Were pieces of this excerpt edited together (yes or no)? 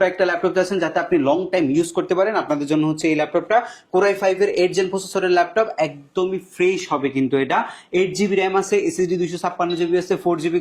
no